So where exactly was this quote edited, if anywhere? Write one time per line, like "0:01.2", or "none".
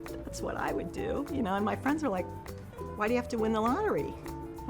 none